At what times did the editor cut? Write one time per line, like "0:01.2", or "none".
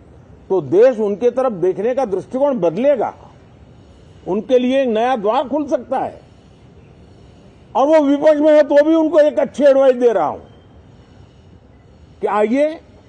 none